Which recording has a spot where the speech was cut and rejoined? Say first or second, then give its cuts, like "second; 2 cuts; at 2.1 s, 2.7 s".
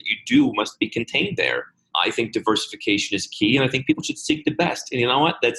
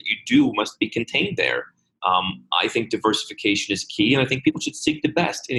first; 1 cut; at 1.8 s